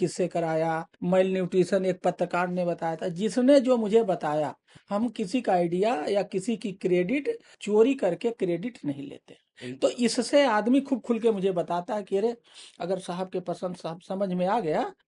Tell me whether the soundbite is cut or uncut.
uncut